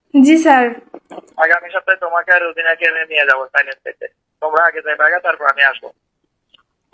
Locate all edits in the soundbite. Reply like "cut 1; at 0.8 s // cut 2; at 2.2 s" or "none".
cut 1; at 1.3 s